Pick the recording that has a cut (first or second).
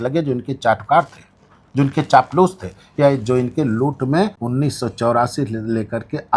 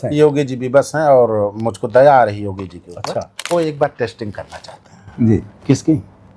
second